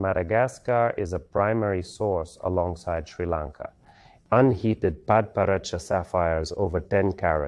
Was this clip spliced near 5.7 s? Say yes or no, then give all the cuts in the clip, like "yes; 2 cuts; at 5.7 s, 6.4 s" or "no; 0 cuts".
no; 1 cut; at 4.1 s